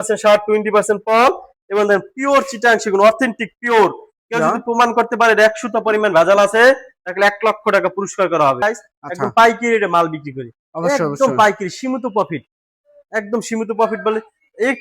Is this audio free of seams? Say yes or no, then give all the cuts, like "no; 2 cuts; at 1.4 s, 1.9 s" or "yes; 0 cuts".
no; 1 cut; at 8.6 s